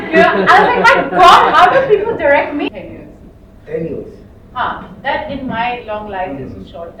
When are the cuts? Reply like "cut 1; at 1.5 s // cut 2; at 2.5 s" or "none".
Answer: cut 1; at 2.7 s